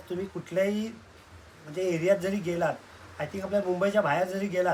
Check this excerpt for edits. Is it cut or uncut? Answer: uncut